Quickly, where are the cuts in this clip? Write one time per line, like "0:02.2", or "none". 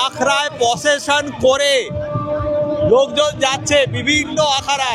none